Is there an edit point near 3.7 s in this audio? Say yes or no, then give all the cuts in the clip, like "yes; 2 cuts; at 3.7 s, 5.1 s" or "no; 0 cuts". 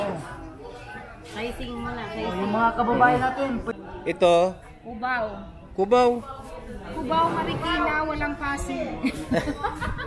yes; 1 cut; at 3.7 s